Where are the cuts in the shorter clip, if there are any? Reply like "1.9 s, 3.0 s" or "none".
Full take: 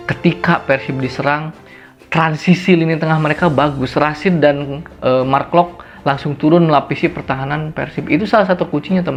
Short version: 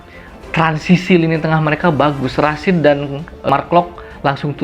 3.5 s